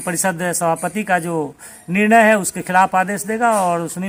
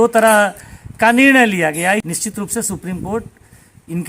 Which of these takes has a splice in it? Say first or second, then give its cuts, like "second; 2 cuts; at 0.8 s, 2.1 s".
second; 1 cut; at 2.0 s